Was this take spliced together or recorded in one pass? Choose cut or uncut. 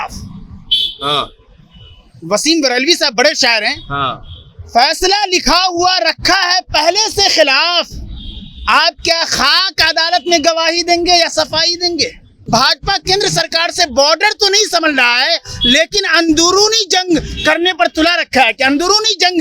cut